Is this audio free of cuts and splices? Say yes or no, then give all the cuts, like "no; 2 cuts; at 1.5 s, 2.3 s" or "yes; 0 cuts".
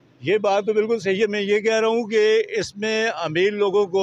yes; 0 cuts